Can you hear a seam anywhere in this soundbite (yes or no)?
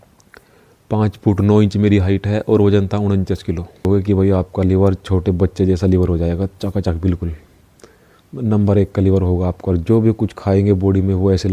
yes